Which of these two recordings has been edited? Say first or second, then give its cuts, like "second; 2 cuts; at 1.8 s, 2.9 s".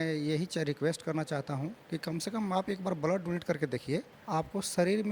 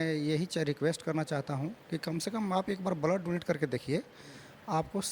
first; 1 cut; at 4.2 s